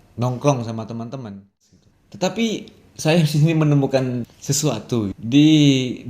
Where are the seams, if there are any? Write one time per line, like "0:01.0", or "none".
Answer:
0:01.6

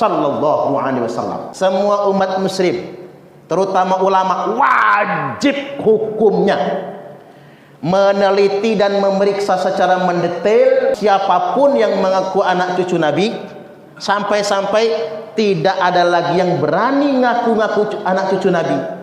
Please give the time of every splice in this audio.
0:01.4
0:11.0

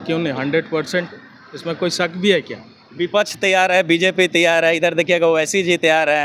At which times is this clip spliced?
none

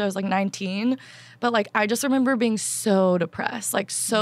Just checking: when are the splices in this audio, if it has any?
none

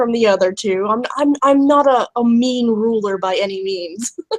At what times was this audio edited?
none

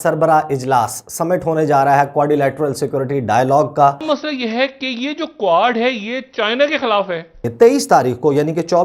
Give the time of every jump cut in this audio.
0:04.0
0:07.5

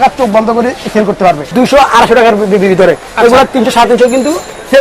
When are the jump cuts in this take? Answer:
0:01.4

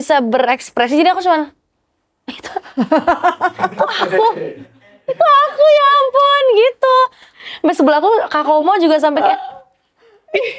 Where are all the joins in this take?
0:07.2

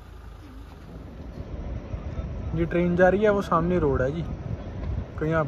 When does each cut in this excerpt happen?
0:01.0

